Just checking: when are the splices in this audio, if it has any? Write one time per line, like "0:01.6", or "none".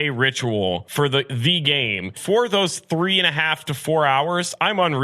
0:00.9
0:02.1